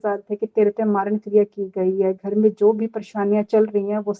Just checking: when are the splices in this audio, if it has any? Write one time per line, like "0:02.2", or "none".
none